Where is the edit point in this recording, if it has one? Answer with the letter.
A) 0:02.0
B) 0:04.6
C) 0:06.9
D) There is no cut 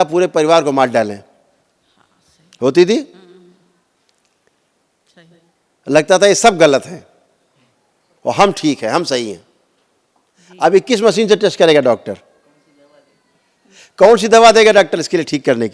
D